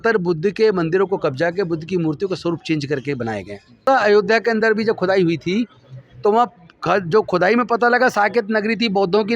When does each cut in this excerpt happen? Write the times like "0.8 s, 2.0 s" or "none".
3.8 s